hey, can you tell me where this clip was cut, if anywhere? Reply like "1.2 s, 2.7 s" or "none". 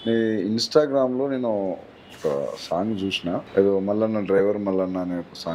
3.5 s